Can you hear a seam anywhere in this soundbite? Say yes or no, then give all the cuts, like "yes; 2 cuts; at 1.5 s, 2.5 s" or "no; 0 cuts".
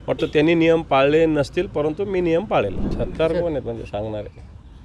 yes; 1 cut; at 2.8 s